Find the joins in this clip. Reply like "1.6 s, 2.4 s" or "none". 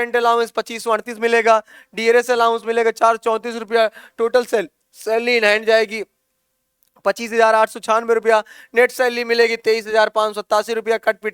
none